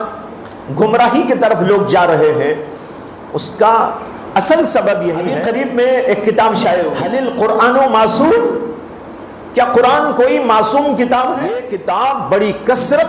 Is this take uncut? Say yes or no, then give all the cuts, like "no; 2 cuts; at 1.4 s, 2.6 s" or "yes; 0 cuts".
no; 3 cuts; at 5.3 s, 7.0 s, 11.7 s